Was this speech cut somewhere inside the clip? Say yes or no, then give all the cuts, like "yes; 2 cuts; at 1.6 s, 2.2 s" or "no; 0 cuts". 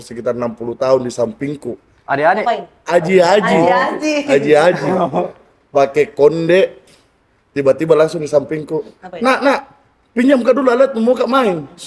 no; 0 cuts